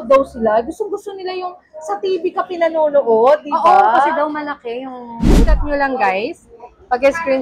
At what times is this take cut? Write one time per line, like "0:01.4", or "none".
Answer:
0:05.4